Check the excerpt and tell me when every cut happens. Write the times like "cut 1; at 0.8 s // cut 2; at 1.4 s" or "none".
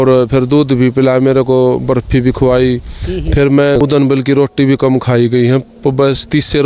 cut 1; at 3.8 s